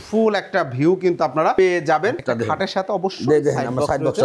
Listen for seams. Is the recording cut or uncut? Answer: cut